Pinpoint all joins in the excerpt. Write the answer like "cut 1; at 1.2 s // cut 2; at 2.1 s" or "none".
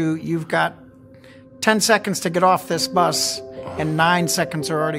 none